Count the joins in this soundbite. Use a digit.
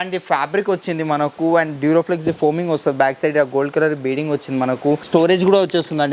1